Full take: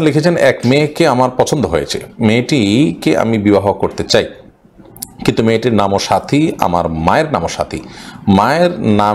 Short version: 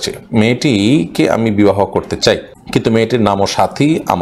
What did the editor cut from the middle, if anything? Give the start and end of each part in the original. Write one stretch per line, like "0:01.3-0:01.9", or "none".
0:04.4-0:05.1